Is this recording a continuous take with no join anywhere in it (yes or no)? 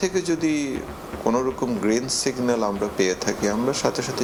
yes